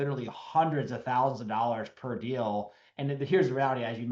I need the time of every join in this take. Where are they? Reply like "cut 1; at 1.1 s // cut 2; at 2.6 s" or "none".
none

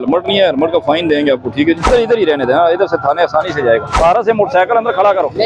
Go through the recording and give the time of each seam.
cut 1; at 1.9 s // cut 2; at 3.9 s

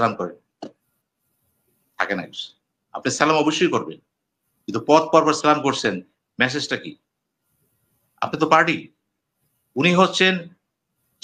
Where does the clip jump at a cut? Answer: none

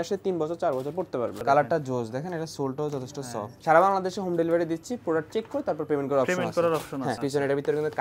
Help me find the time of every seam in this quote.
cut 1; at 1.4 s // cut 2; at 3.5 s // cut 3; at 7.2 s

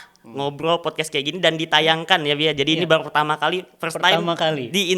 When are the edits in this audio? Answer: none

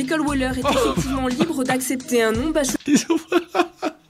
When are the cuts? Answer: cut 1; at 2.8 s

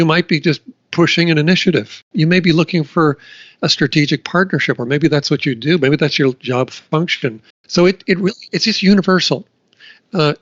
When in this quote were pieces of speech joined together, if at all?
cut 1; at 2.1 s // cut 2; at 7.5 s

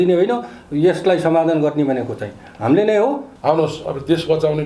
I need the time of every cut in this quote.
cut 1; at 3.3 s

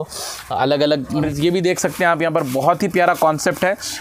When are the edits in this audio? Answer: cut 1; at 1.2 s

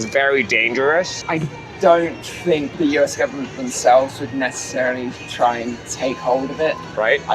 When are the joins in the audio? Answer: none

